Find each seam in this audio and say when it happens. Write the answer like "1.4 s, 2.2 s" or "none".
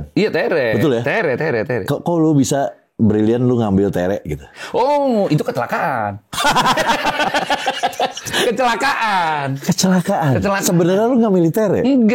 none